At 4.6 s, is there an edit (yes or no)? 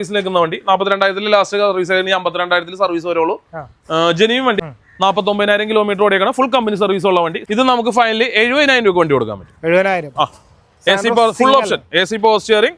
yes